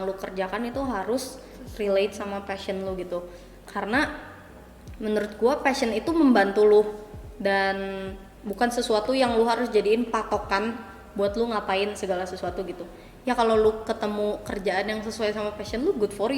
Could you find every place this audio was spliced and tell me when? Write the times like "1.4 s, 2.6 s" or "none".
none

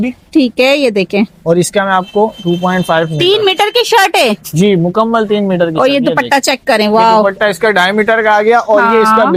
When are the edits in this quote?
none

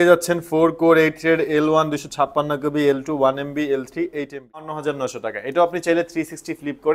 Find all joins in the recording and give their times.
4.8 s

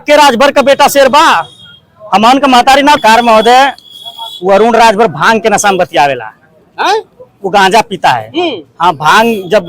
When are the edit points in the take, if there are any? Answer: 3.0 s

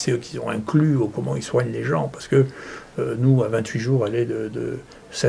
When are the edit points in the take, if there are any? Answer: none

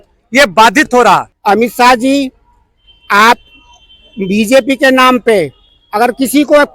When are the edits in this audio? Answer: 1.3 s

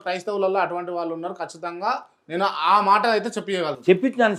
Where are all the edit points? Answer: none

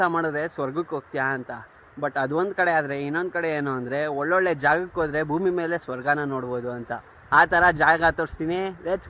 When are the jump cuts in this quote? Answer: none

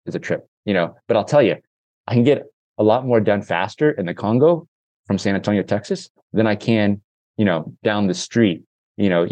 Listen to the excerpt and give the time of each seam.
none

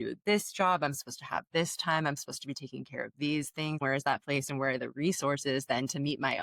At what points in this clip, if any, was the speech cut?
3.8 s

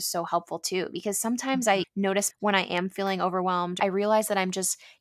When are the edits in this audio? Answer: 2.3 s, 3.8 s

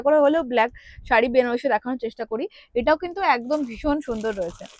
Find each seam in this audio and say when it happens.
none

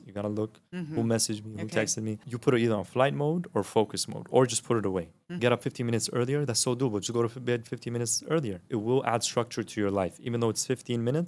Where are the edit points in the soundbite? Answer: 2.3 s, 5.3 s, 8.7 s

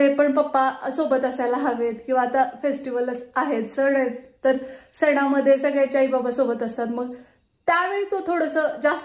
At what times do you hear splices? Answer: none

